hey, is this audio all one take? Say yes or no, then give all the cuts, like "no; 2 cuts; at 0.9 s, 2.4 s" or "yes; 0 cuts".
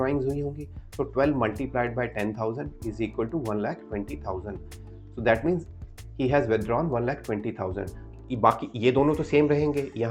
no; 1 cut; at 8.0 s